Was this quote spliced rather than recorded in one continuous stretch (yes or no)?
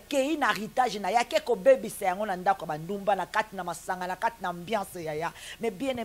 no